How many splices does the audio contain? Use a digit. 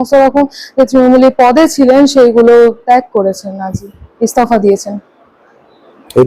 0